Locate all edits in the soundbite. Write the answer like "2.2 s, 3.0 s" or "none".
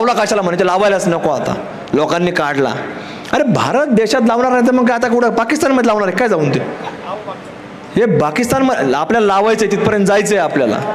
none